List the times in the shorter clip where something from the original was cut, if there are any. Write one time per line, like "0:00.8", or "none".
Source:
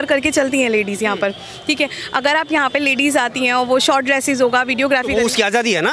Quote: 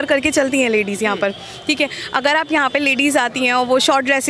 none